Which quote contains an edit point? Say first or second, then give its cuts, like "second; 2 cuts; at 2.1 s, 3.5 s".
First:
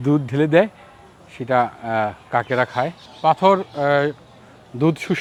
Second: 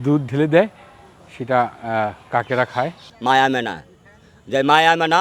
second; 1 cut; at 3.0 s